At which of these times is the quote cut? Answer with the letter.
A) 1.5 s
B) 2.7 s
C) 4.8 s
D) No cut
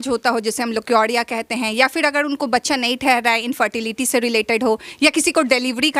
D